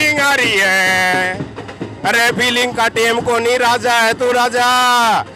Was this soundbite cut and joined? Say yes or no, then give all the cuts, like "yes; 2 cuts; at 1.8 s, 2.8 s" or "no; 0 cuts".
no; 0 cuts